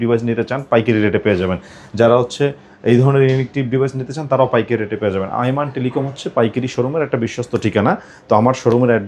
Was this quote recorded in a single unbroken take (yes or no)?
yes